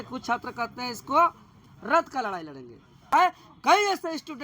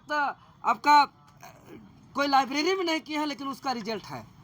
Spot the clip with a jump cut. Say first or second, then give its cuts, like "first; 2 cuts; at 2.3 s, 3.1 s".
first; 1 cut; at 3.1 s